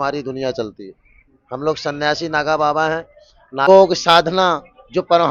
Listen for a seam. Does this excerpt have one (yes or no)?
yes